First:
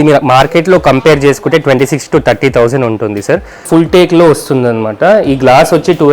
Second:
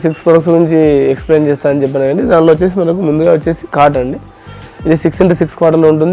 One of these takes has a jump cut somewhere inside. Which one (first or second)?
first